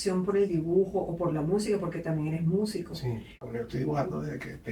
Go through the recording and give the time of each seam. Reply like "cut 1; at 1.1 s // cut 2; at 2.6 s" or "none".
cut 1; at 3.4 s